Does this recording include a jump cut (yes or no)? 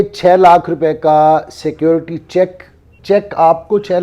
yes